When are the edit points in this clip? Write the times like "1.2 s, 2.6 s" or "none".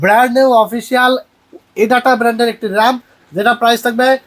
none